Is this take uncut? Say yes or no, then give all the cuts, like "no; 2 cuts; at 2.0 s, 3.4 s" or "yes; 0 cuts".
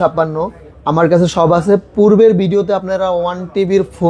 yes; 0 cuts